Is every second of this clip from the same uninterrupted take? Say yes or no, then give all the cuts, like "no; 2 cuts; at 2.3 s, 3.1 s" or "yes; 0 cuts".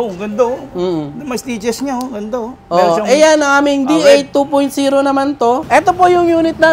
no; 1 cut; at 5.6 s